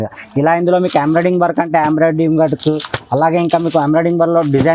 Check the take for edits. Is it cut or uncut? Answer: uncut